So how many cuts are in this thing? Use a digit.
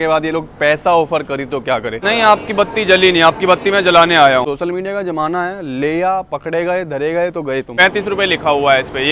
3